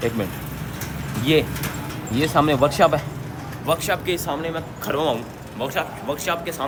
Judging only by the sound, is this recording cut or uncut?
uncut